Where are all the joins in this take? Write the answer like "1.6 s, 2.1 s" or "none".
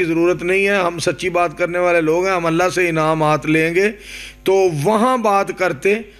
none